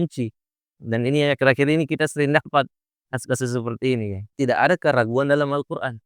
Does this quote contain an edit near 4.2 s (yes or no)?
yes